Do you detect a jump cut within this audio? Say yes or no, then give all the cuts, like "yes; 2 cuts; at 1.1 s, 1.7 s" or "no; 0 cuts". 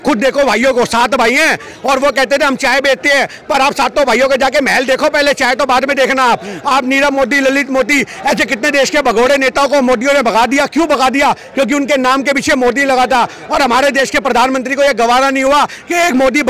no; 0 cuts